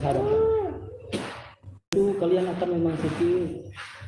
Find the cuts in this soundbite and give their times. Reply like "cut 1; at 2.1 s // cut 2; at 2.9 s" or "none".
cut 1; at 1.9 s